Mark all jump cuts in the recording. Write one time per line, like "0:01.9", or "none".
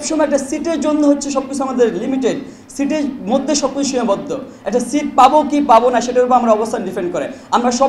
none